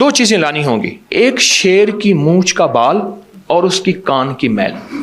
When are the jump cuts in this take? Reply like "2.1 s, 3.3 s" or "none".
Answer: 1.0 s